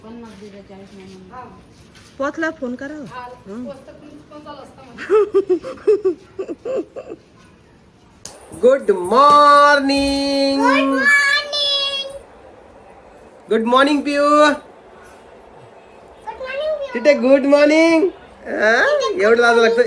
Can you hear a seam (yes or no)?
no